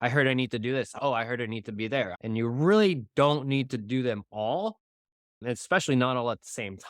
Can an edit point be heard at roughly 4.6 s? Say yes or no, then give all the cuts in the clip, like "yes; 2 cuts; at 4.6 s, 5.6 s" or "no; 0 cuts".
no; 2 cuts; at 0.9 s, 2.2 s